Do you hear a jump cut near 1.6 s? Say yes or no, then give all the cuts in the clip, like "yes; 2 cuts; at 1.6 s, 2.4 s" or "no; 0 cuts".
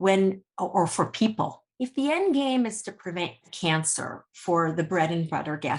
yes; 1 cut; at 1.6 s